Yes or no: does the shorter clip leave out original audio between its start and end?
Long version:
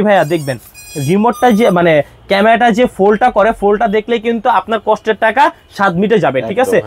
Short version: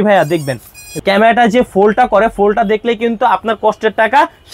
yes